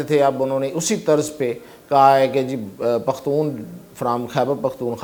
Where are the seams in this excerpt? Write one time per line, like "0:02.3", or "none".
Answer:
none